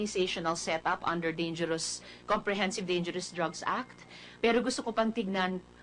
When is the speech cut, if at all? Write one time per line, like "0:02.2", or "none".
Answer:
none